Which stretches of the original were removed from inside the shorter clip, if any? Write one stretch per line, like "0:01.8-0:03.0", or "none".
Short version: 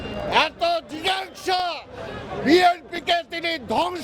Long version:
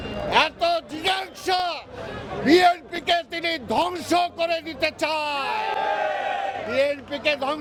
none